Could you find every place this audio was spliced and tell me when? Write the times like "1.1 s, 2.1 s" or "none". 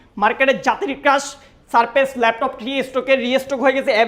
none